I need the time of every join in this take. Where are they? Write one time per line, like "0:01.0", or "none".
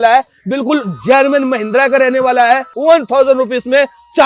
0:02.7